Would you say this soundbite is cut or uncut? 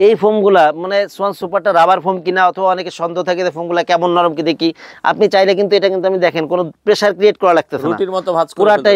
uncut